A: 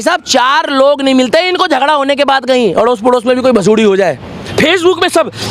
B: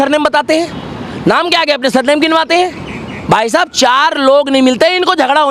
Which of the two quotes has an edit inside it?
A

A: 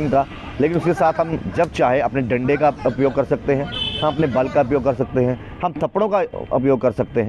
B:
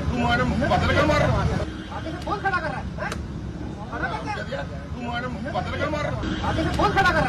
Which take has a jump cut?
B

